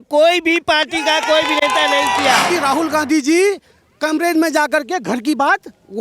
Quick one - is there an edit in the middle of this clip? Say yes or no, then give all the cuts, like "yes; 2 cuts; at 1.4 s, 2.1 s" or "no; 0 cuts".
yes; 1 cut; at 2.5 s